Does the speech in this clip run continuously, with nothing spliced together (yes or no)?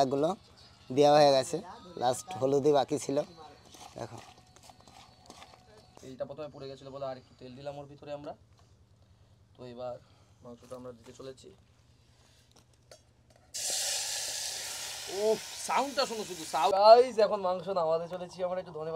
no